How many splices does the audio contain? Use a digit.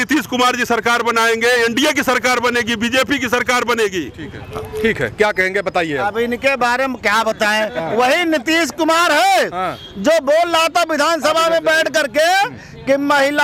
0